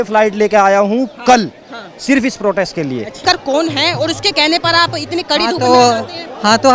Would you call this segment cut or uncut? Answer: cut